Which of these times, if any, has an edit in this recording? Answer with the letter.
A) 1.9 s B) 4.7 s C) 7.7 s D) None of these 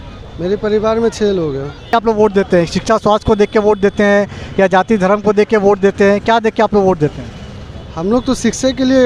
A